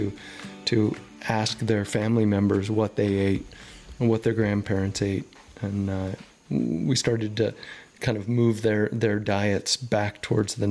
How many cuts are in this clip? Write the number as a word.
zero